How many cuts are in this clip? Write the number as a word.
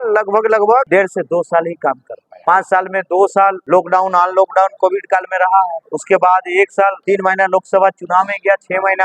five